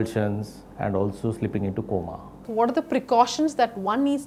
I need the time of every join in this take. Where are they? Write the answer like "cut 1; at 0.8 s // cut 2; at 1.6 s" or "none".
cut 1; at 2.4 s